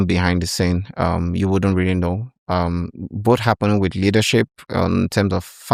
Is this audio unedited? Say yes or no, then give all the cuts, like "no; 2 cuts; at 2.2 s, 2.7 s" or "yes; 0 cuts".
yes; 0 cuts